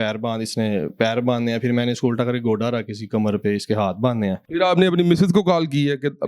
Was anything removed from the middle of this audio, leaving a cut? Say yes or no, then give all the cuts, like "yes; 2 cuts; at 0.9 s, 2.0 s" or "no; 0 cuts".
yes; 1 cut; at 4.4 s